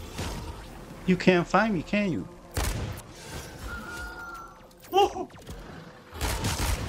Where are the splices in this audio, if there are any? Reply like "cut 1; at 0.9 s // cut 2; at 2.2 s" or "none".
cut 1; at 3.0 s